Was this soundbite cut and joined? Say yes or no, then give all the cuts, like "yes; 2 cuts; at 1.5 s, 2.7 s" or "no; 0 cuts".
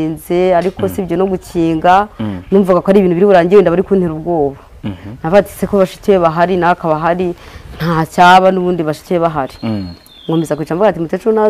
no; 0 cuts